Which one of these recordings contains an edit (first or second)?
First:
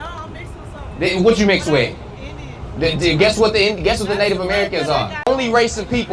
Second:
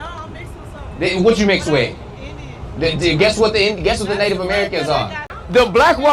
second